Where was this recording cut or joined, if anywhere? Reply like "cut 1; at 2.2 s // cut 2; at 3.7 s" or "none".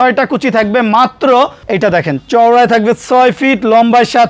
cut 1; at 1.6 s